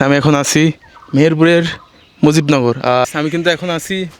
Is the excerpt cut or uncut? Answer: cut